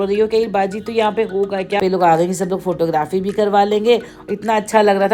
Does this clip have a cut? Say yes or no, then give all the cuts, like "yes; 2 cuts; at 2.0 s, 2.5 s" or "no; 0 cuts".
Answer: yes; 1 cut; at 1.8 s